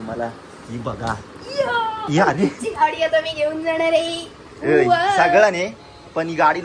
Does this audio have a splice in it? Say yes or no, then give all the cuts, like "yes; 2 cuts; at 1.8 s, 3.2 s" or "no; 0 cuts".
no; 0 cuts